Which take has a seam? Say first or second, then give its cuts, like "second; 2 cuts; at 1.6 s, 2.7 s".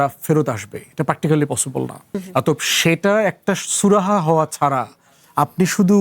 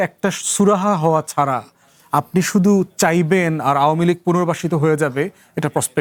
first; 1 cut; at 2.2 s